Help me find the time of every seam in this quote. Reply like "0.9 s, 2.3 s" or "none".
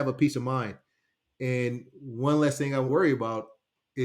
2.9 s

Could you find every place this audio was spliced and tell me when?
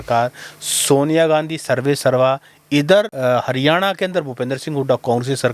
3.1 s

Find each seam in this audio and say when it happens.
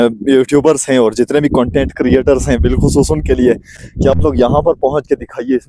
none

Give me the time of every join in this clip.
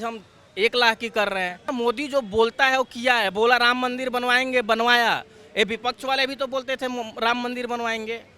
1.7 s

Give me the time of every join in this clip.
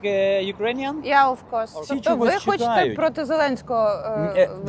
1.8 s

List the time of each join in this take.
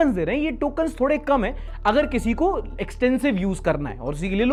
none

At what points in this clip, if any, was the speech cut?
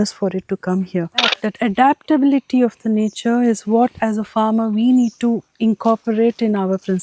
1.4 s

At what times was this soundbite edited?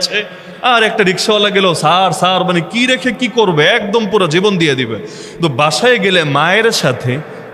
none

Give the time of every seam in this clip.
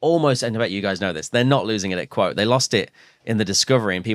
none

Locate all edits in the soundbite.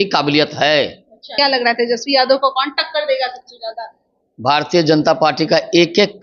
1.3 s

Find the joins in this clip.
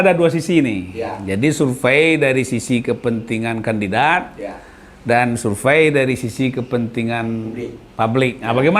none

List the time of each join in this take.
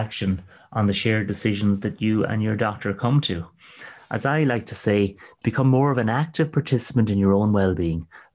none

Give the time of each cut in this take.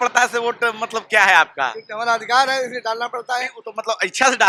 none

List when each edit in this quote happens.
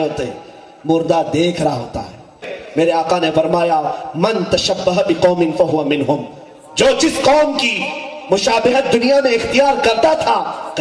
2.4 s

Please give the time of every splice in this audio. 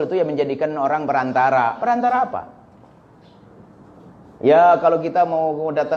none

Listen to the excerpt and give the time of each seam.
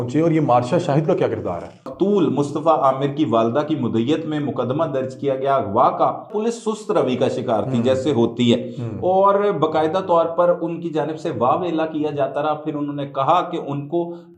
1.9 s, 6.3 s

